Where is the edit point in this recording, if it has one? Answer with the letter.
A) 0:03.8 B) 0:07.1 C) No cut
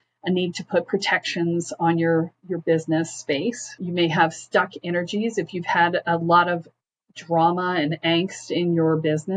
A